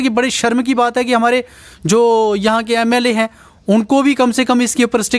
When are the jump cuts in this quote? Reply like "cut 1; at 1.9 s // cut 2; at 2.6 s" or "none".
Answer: none